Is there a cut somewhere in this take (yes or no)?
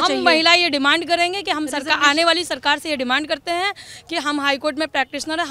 no